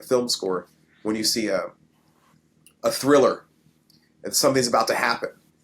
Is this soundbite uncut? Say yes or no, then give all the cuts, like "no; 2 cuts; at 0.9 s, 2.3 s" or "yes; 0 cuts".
yes; 0 cuts